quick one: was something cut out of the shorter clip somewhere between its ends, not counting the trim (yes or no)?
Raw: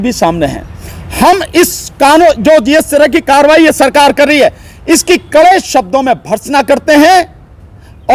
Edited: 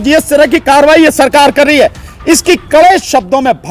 no